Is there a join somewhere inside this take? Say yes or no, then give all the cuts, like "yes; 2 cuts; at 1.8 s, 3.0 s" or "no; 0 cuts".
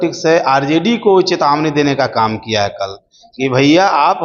no; 0 cuts